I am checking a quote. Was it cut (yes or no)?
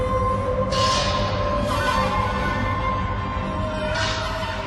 no